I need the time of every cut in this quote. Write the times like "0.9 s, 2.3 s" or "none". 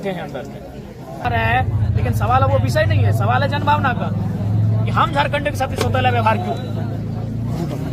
1.2 s